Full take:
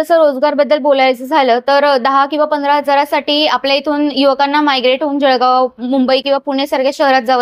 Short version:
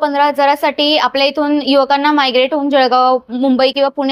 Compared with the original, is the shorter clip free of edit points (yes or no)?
yes